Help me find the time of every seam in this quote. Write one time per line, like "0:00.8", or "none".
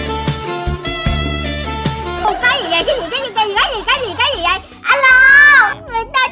none